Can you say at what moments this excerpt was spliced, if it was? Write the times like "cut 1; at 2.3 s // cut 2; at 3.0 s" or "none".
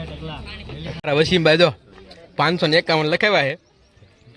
cut 1; at 1.0 s